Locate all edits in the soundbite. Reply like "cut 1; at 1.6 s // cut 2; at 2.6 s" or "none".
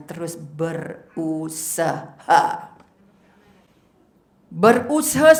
none